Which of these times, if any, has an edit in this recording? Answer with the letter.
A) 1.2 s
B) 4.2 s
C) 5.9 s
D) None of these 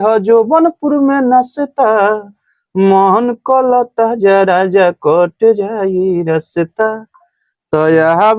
D